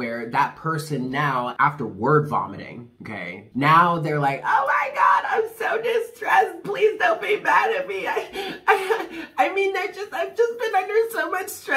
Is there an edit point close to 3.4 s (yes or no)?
yes